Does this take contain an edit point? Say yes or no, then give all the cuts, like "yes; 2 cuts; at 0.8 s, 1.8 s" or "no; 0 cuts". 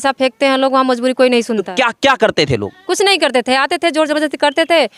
no; 0 cuts